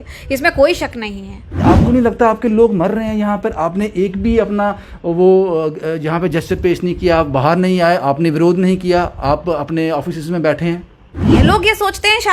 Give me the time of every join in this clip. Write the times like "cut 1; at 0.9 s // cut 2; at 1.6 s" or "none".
cut 1; at 1.6 s // cut 2; at 11.1 s

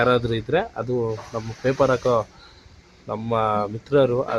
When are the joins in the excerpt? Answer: none

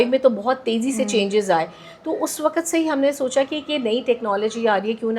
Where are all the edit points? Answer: none

